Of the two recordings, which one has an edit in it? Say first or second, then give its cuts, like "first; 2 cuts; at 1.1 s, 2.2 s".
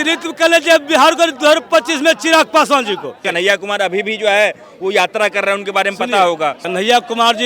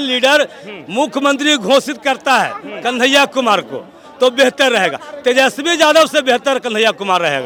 first; 2 cuts; at 3.3 s, 6.6 s